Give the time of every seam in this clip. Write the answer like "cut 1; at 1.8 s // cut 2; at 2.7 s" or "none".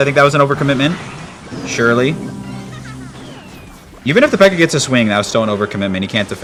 none